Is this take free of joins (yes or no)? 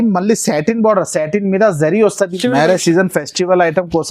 no